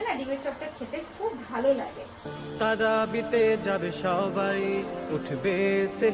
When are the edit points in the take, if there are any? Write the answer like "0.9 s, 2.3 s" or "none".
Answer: none

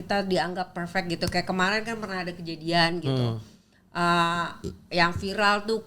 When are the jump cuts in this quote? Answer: none

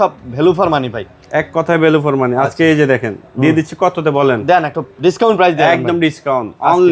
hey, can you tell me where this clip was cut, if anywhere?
none

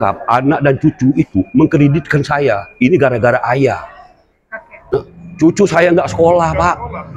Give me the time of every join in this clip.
4.9 s

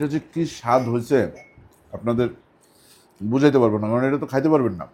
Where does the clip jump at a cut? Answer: none

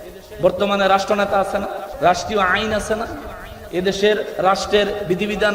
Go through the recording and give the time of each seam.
1.8 s

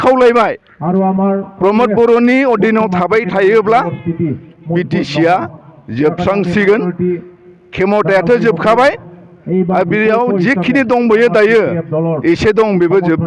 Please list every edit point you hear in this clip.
none

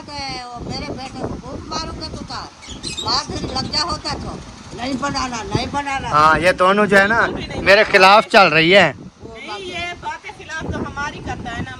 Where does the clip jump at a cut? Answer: none

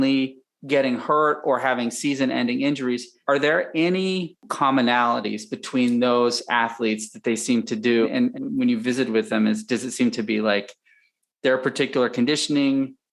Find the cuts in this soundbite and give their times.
3.1 s, 4.4 s, 8.1 s

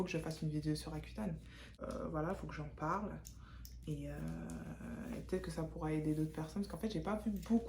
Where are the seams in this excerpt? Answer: 1.8 s

